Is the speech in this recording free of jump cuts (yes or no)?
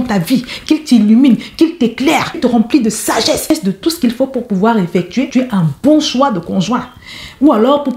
no